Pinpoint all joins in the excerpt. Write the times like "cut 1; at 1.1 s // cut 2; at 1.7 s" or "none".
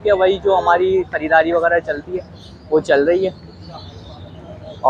none